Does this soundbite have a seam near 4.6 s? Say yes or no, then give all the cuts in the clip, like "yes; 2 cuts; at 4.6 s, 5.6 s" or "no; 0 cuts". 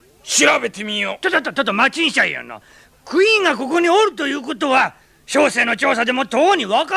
yes; 1 cut; at 4.6 s